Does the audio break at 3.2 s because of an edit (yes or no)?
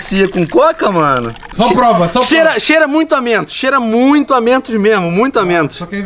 no